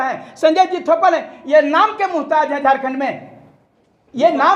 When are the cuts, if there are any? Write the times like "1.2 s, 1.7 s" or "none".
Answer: none